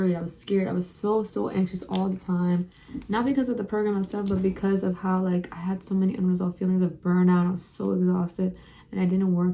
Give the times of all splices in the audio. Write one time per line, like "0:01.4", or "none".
none